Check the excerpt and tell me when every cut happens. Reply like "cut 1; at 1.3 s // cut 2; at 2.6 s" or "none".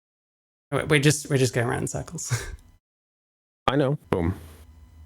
cut 1; at 4.0 s